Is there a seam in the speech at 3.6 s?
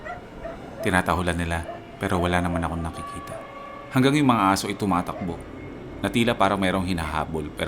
yes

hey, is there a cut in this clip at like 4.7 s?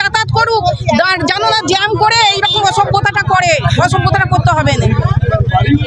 no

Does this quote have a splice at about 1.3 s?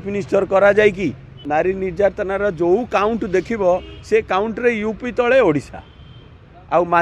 yes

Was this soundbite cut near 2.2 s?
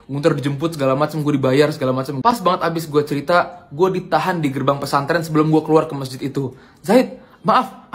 yes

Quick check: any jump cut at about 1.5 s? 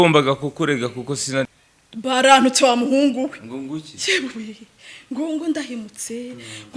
yes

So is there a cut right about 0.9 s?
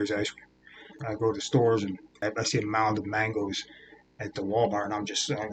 yes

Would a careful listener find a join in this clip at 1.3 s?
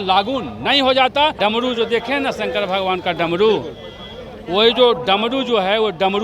yes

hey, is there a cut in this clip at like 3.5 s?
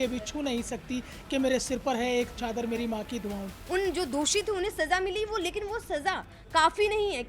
yes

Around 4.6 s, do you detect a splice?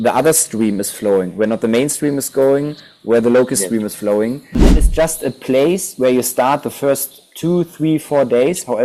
yes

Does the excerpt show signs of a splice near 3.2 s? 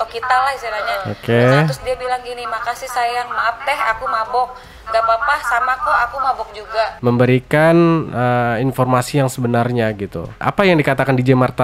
no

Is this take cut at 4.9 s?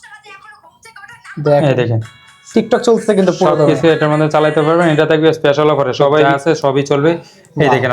no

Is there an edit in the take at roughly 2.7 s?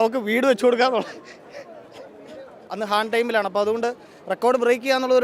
yes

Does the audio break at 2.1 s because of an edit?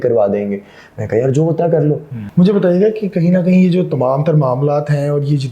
yes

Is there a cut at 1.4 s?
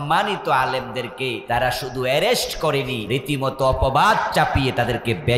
yes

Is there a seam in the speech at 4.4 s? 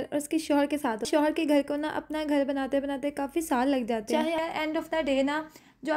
yes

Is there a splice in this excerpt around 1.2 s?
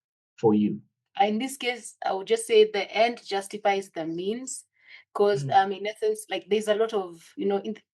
yes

